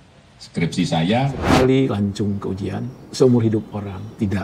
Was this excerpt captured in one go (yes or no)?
no